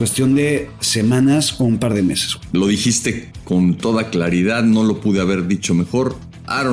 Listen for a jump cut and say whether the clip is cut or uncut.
cut